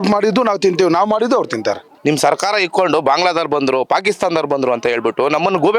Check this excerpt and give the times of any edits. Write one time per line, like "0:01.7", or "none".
0:01.9

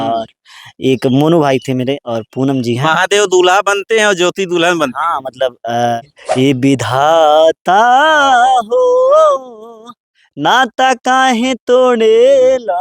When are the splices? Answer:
0:06.0

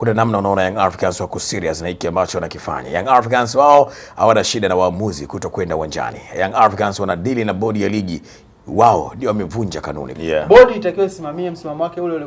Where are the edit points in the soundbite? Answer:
0:10.1

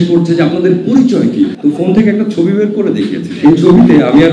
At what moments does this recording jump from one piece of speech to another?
0:01.6

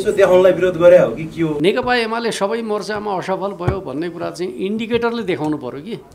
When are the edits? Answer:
0:01.6

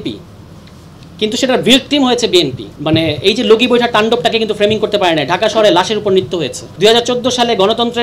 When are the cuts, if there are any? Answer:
0:02.7
0:06.6

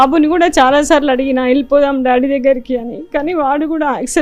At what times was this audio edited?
none

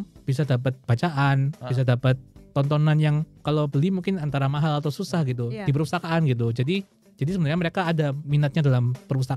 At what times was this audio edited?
none

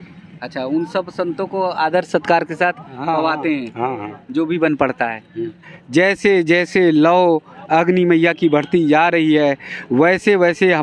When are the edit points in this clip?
0:05.7

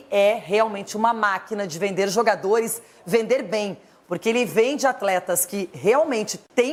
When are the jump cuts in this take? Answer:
none

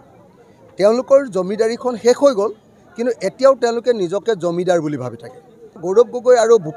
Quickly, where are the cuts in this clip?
0:05.8

